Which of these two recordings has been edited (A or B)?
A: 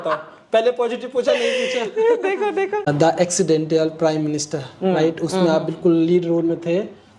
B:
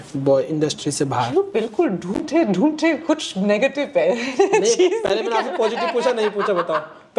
A